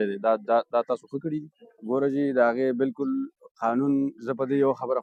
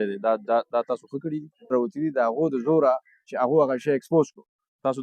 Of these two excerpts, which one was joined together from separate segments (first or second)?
second